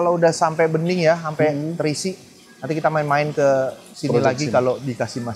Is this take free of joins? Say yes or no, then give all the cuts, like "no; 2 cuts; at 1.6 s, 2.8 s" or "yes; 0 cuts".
no; 1 cut; at 3.9 s